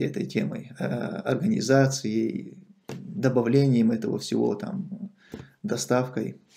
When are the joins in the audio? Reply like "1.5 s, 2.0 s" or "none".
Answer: none